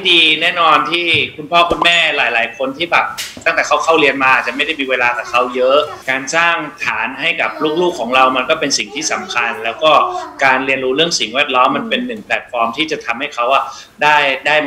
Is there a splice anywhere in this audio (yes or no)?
yes